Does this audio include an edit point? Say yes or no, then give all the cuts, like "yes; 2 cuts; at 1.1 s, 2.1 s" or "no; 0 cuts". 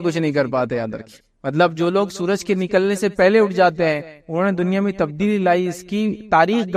no; 0 cuts